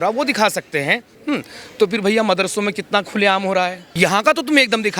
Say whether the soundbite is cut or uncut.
cut